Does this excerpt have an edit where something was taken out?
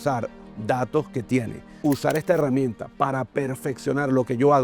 yes; 1 cut; at 1.6 s

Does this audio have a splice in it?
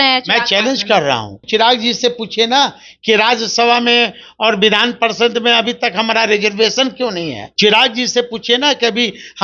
yes; 2 cuts; at 1.4 s, 7.4 s

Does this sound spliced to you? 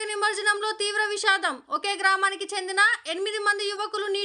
no; 0 cuts

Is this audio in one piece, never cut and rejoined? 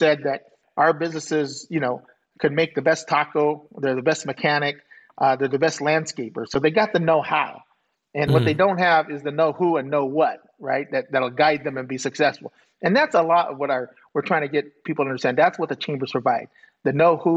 yes; 0 cuts

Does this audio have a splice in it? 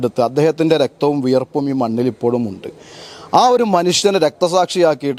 no; 0 cuts

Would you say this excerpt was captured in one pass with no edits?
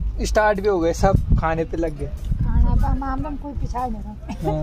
yes; 0 cuts

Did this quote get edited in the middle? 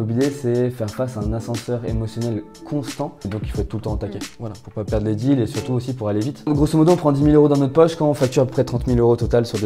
yes; 2 cuts; at 3.3 s, 6.5 s

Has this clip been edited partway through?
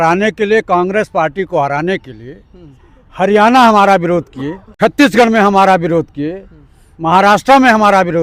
no; 0 cuts

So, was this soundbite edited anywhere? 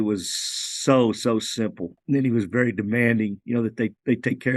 yes; 1 cut; at 2.0 s

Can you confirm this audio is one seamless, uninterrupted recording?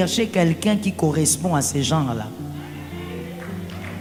yes; 0 cuts

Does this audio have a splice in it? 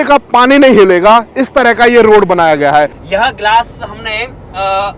yes; 1 cut; at 3.0 s

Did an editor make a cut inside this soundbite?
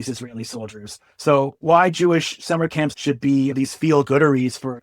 yes; 1 cut; at 3.0 s

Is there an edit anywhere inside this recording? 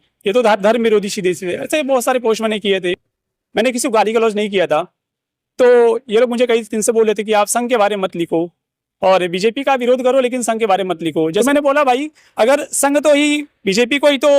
yes; 1 cut; at 11.4 s

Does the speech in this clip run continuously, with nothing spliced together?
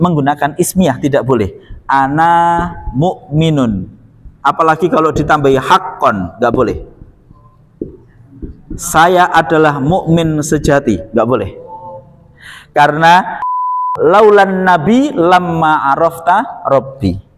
no; 1 cut; at 13.6 s

